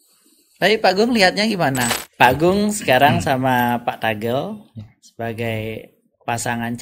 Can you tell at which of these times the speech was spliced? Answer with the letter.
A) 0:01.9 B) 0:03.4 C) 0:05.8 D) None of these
A